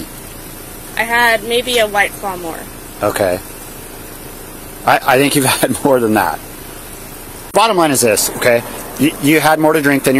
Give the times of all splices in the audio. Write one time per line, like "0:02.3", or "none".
0:07.4